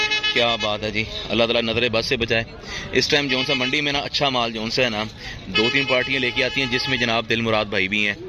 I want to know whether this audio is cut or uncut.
uncut